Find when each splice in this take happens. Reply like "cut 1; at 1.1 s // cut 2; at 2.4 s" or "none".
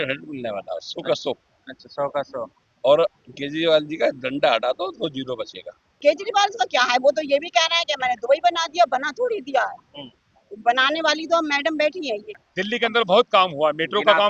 cut 1; at 6.0 s // cut 2; at 12.3 s